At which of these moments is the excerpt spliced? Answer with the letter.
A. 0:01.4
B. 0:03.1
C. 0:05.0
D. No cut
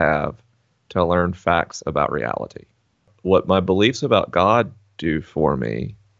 B